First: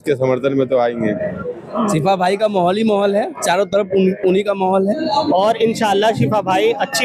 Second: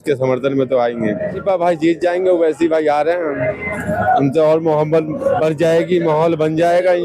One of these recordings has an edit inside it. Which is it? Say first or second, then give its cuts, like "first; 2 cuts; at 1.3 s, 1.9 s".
first; 2 cuts; at 1.4 s, 5.0 s